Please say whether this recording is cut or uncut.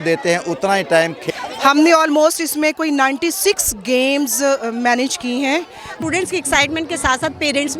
cut